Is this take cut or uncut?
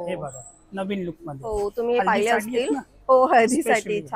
uncut